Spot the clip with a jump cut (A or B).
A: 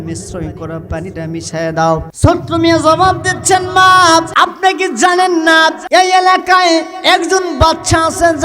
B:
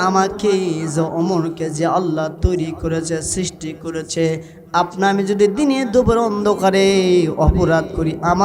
A